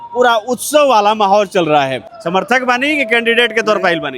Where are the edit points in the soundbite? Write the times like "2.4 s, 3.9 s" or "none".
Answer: 2.1 s

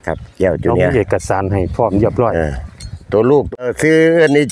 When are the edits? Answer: 3.6 s

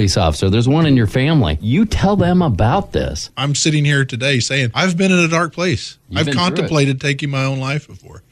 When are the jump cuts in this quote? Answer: 3.2 s

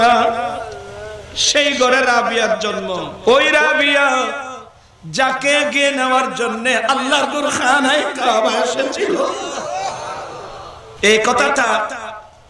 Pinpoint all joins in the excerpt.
3.1 s, 10.8 s

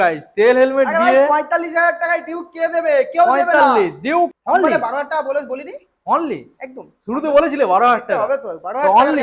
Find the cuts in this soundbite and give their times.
4.3 s

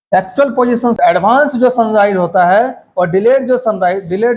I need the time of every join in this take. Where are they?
1.0 s

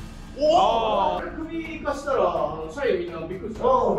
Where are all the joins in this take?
1.2 s

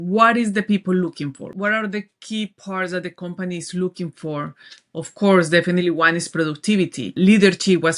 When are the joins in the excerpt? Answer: 1.5 s, 7.1 s

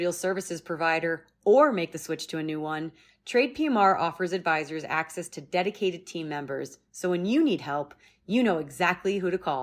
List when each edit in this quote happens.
none

